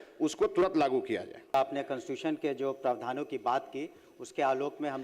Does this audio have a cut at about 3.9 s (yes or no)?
no